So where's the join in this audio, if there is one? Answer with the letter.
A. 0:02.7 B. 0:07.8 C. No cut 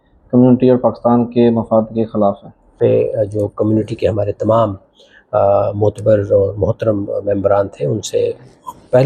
A